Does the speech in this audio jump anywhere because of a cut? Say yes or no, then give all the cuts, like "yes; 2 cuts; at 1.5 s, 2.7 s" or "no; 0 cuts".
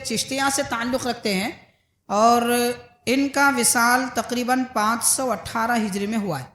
no; 0 cuts